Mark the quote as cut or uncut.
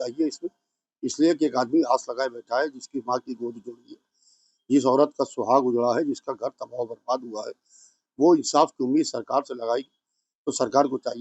uncut